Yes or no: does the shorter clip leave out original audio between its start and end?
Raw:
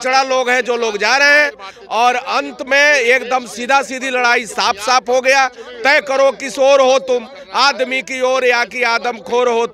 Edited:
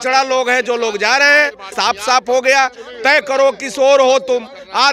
yes